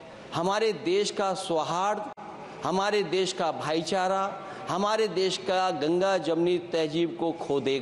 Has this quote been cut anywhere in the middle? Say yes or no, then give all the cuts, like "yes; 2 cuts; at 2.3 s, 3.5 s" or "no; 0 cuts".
no; 0 cuts